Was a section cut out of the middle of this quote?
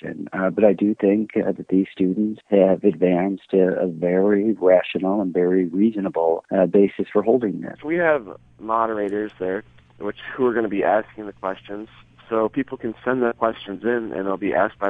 yes; 3 cuts; at 2.4 s, 6.4 s, 7.8 s

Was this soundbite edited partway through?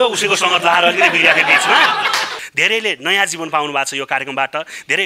yes; 1 cut; at 2.4 s

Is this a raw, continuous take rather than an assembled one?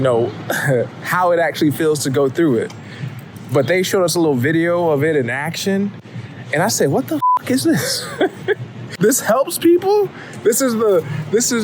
no; 2 cuts; at 5.9 s, 8.8 s

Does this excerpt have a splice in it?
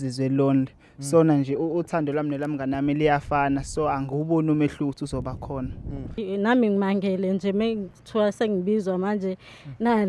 yes; 1 cut; at 6.2 s

